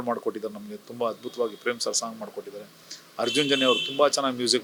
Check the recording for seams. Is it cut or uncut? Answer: uncut